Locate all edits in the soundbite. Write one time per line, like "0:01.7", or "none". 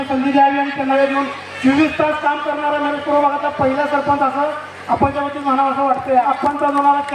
0:01.0
0:06.3

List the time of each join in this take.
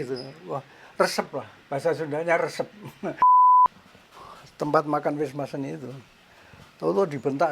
0:03.1
0:03.9

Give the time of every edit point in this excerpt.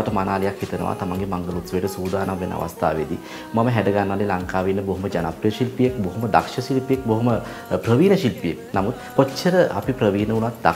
none

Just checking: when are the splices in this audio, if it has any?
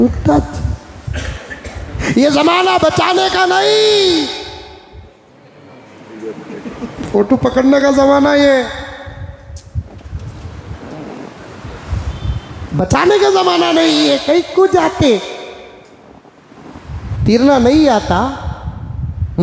0:02.0
0:17.1

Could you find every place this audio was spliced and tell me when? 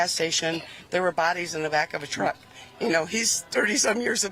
none

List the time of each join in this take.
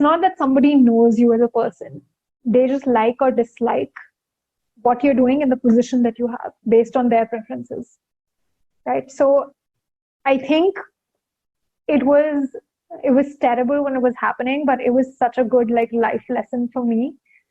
none

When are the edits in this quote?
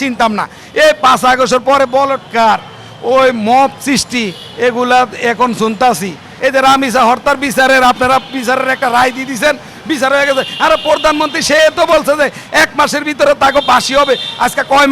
0:06.3

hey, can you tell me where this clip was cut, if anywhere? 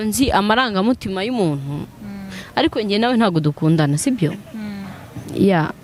none

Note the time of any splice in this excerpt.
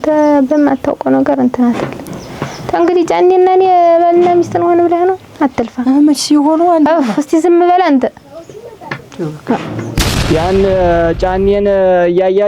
0:10.1

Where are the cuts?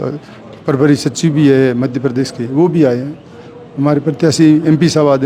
none

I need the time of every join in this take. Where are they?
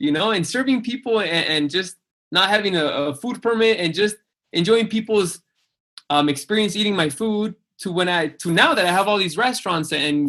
none

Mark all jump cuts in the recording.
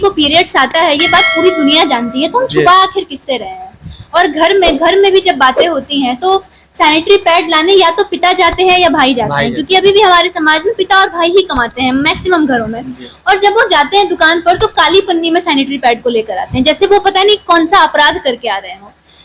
none

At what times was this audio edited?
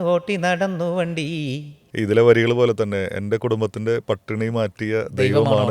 0:01.8

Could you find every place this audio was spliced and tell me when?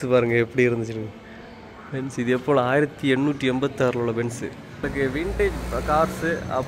0:04.9

